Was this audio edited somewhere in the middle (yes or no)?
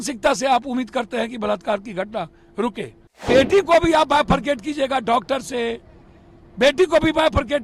yes